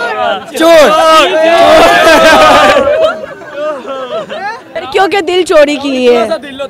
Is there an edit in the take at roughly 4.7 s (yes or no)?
yes